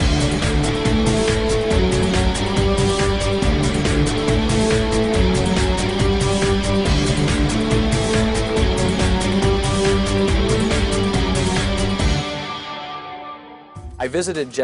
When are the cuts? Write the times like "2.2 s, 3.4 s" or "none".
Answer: none